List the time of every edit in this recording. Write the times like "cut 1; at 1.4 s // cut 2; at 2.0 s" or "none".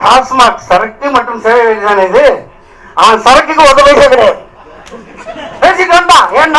none